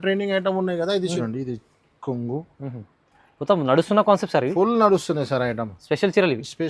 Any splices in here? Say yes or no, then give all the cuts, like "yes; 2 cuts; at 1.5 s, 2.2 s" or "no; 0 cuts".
yes; 1 cut; at 1.2 s